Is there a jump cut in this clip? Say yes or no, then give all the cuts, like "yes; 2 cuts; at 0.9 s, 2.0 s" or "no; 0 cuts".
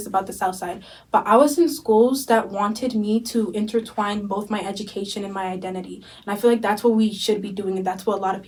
no; 0 cuts